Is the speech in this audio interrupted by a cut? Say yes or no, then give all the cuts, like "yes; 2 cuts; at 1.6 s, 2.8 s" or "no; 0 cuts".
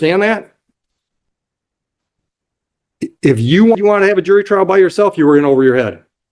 yes; 1 cut; at 3.8 s